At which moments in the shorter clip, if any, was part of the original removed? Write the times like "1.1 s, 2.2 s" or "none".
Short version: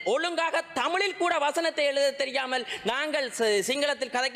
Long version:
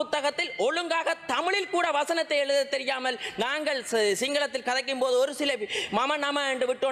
none

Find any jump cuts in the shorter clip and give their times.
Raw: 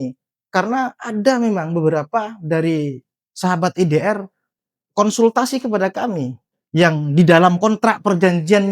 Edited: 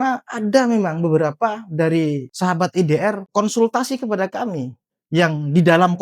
2.3 s, 3.2 s

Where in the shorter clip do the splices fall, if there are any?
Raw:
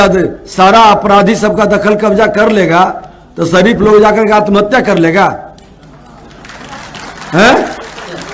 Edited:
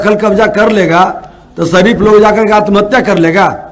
none

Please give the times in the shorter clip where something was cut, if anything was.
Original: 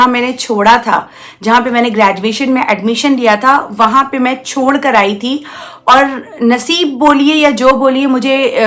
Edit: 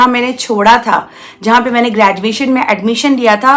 none

